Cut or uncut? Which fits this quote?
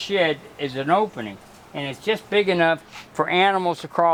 uncut